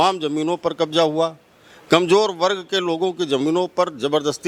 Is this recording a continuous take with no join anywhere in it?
yes; 0 cuts

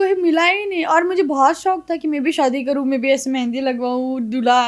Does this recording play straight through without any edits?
yes; 0 cuts

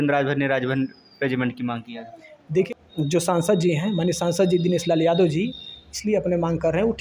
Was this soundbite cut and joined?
yes; 1 cut; at 2.7 s

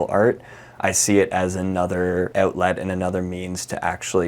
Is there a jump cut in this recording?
yes; 1 cut; at 2.3 s

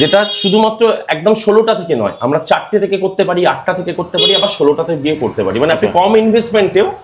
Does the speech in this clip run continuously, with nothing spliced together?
yes; 0 cuts

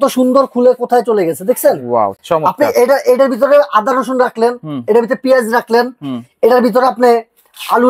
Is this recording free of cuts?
yes; 0 cuts

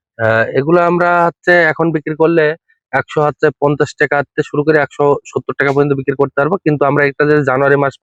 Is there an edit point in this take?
no; 0 cuts

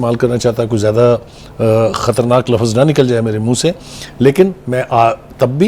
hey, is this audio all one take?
yes; 0 cuts

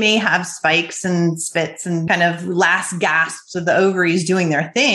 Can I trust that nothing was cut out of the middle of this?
no; 1 cut; at 2.0 s

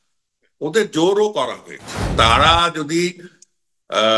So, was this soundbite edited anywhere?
yes; 1 cut; at 2.1 s

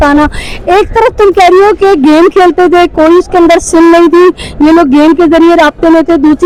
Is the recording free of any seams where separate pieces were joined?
yes; 0 cuts

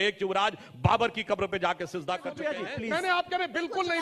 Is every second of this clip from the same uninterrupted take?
no; 1 cut; at 2.3 s

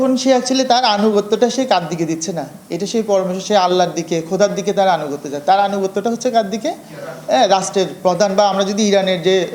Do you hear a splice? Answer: no; 0 cuts

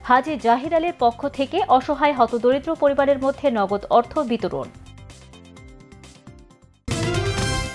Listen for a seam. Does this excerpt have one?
yes; 1 cut; at 6.8 s

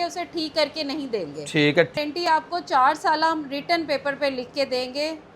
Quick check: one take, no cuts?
no; 1 cut; at 1.9 s

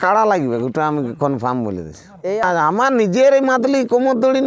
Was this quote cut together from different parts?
yes; 1 cut; at 2.4 s

